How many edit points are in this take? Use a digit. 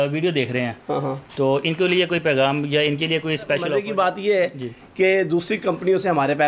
1